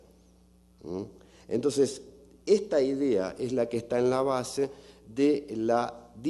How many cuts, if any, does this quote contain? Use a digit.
1